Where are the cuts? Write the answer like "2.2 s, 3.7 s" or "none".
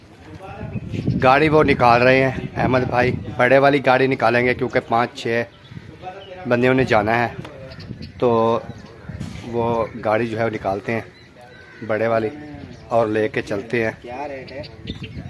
none